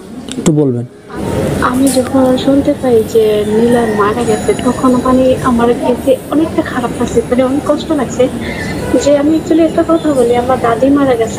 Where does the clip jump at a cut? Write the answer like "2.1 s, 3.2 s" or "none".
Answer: 1.2 s